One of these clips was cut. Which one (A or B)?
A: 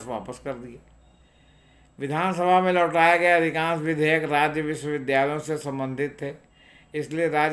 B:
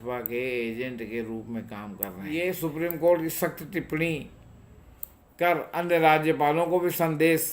B